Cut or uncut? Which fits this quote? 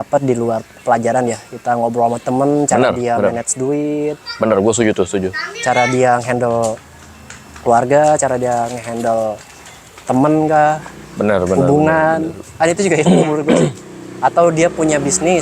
uncut